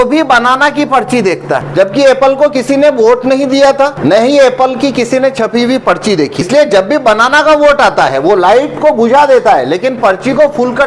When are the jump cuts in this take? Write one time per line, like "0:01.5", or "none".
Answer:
0:01.7
0:04.0
0:06.5